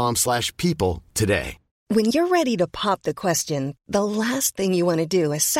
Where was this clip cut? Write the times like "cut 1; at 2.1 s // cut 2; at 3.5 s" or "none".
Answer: cut 1; at 1.8 s